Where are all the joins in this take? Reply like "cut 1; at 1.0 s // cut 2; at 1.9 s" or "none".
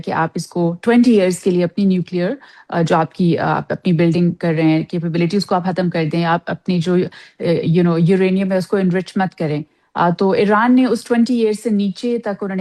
none